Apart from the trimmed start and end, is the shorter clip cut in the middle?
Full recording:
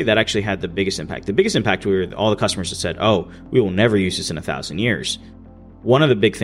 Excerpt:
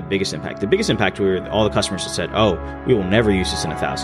no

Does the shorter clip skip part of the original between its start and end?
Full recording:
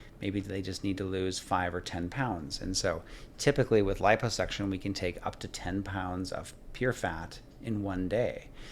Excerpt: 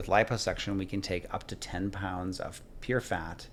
no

